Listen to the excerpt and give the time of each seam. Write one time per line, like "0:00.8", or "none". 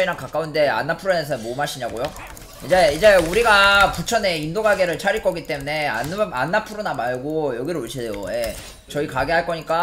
none